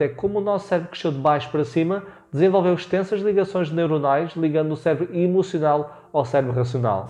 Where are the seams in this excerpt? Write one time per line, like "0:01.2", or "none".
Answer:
none